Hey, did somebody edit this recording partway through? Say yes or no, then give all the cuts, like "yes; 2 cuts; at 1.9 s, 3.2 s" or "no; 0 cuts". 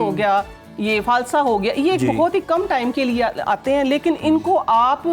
no; 0 cuts